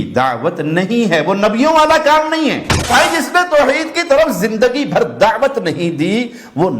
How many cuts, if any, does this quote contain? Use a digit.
1